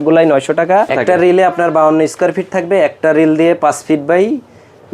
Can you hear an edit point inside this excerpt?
yes; 1 cut; at 0.9 s

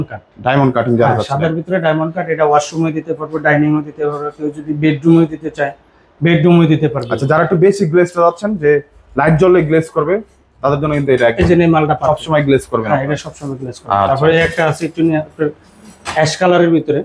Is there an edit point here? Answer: no; 0 cuts

